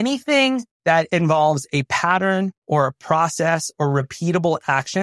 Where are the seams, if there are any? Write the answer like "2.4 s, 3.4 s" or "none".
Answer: 1.1 s